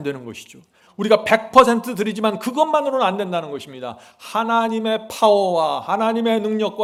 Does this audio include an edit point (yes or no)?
no